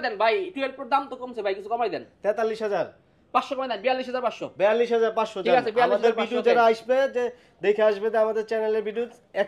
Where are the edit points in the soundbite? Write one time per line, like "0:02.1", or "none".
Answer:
none